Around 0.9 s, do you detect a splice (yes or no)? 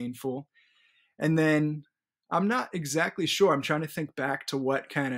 no